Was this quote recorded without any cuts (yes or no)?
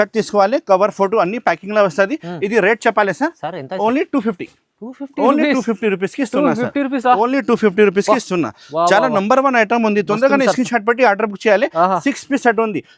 yes